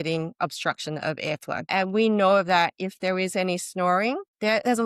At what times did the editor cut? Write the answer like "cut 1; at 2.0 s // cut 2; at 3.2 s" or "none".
cut 1; at 1.6 s